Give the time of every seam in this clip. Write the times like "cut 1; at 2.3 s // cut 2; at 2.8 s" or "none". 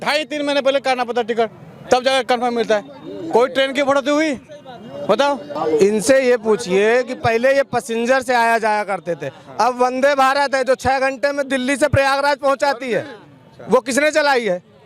cut 1; at 5.6 s